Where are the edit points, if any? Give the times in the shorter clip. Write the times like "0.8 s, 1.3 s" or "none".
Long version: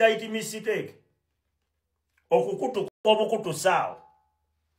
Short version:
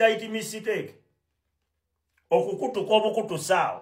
2.9 s

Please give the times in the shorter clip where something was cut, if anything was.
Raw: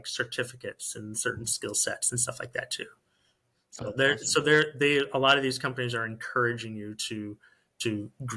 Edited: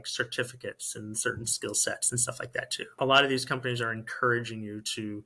2.9 s

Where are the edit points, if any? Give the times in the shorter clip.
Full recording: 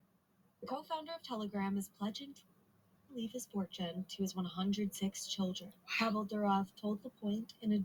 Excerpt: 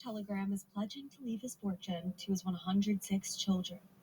1.1 s

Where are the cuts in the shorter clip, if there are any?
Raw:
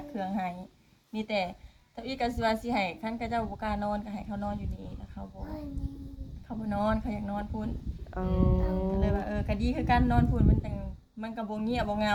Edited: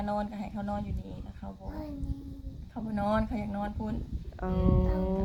none

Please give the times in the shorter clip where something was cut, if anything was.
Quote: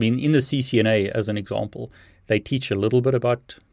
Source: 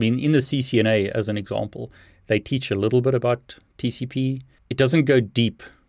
none

